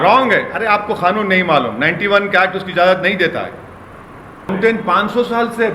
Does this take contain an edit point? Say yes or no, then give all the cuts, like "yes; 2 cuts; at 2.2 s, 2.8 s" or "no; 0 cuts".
yes; 1 cut; at 4.5 s